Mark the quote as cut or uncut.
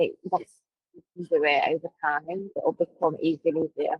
cut